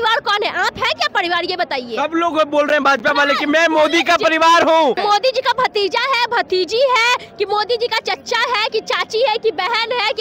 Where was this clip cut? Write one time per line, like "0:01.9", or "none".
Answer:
0:05.0